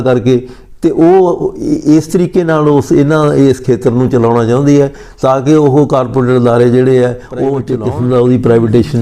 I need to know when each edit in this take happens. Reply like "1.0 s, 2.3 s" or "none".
7.7 s